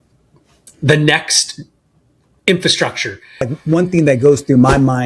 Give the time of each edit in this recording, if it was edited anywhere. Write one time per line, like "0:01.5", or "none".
0:03.6